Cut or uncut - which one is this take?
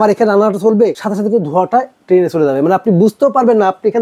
cut